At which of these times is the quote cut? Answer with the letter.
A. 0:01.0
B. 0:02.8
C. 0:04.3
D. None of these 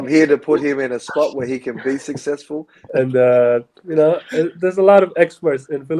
B